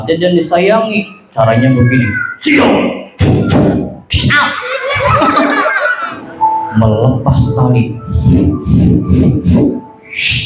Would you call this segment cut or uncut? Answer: cut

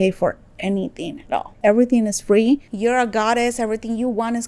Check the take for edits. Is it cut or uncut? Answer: uncut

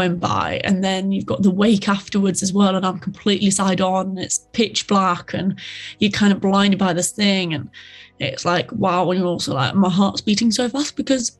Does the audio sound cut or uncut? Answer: uncut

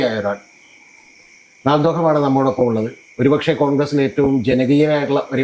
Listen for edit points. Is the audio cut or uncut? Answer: uncut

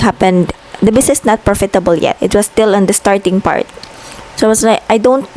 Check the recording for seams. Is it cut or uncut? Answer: uncut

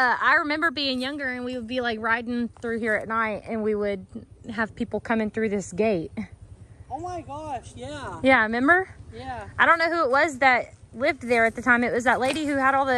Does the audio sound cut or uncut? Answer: uncut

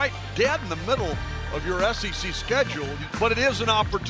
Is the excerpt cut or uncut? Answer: cut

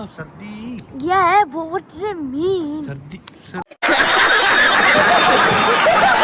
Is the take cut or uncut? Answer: uncut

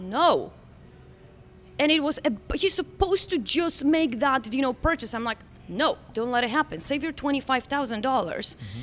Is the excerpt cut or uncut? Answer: uncut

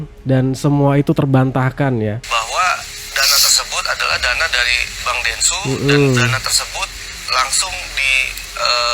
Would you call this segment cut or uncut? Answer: cut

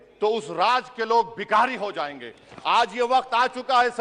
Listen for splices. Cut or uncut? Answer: uncut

